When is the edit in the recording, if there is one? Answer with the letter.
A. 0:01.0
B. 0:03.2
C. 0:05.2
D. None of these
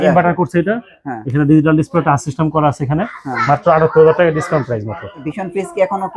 C